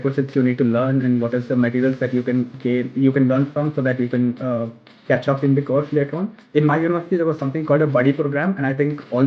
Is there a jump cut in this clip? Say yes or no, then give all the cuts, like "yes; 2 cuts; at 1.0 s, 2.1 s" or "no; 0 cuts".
yes; 1 cut; at 6.3 s